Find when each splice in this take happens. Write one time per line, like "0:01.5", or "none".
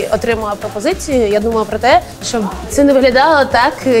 0:02.7